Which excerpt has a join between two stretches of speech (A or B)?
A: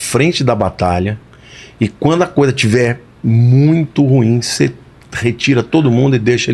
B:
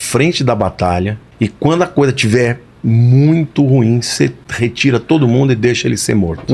B